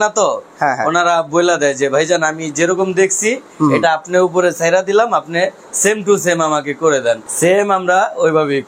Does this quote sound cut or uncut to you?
cut